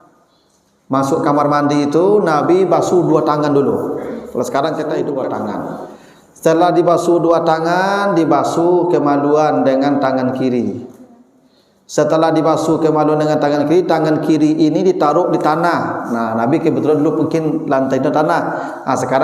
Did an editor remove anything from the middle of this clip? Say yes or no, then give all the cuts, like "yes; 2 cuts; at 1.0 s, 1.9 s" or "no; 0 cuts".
yes; 1 cut; at 5.1 s